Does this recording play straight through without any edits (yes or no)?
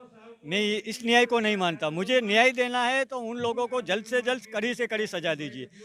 yes